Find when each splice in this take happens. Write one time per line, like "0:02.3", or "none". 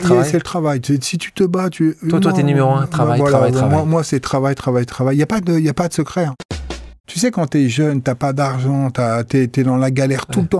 0:06.4